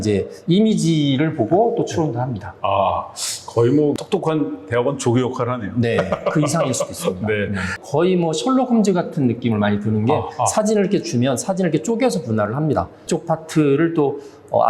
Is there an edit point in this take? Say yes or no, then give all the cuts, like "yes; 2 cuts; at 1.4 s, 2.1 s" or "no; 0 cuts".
yes; 3 cuts; at 3.9 s, 7.8 s, 13.0 s